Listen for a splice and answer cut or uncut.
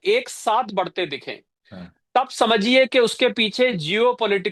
uncut